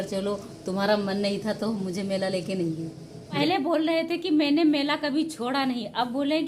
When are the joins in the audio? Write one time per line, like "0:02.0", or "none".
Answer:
0:03.4